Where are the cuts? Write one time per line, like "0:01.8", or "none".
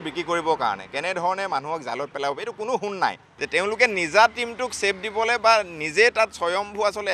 0:03.3